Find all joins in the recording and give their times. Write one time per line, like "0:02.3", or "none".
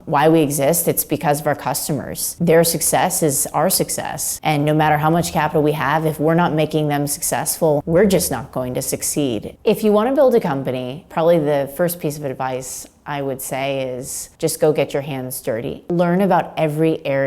0:09.5
0:15.8